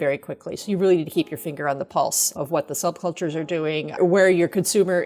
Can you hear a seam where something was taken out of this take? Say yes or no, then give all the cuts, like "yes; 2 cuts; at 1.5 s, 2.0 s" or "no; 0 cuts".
yes; 1 cut; at 3.9 s